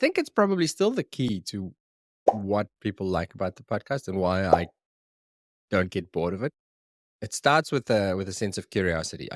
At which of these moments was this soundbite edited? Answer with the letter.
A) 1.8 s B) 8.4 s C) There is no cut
C